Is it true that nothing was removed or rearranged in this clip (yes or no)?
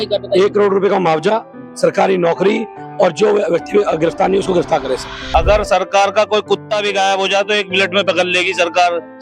no